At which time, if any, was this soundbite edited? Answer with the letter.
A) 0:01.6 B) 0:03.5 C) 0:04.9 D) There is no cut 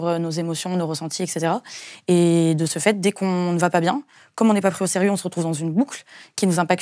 D